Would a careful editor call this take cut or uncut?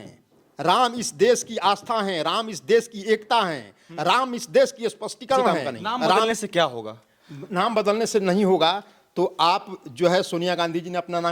cut